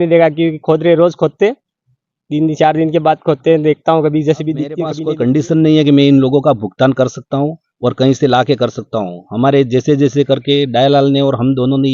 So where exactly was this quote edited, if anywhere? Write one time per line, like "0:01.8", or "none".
0:05.0

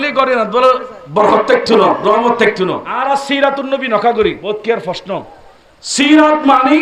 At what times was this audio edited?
0:02.9
0:04.4

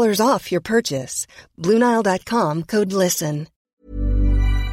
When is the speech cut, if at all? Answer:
0:03.7

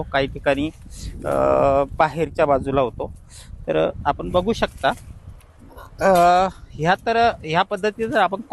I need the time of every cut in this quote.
none

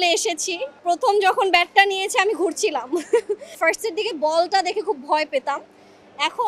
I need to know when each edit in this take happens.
0:00.8
0:03.6

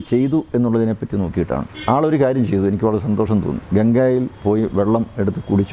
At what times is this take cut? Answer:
none

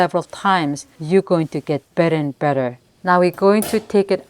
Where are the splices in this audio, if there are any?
0:00.9
0:02.8

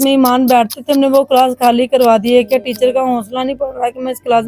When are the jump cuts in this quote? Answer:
none

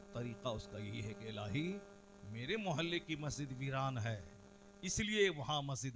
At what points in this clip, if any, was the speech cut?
none

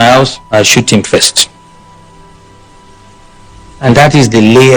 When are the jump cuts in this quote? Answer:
0:01.7
0:03.8

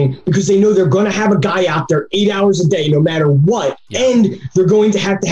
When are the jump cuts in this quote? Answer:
0:03.8

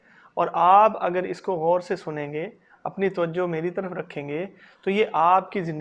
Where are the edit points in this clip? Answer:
none

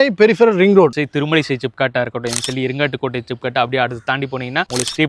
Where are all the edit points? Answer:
0:01.0

